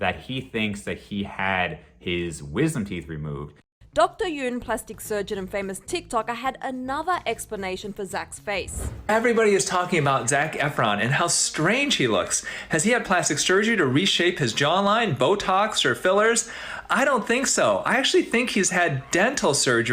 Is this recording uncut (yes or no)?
yes